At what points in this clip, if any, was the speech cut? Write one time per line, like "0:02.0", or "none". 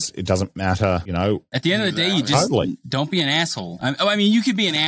0:01.5
0:03.7